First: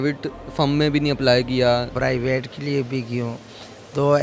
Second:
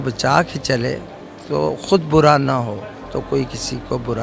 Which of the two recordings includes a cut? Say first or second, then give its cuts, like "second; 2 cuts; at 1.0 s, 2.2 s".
first; 1 cut; at 1.9 s